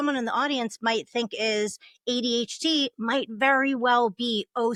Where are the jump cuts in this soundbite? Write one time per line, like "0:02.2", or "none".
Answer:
none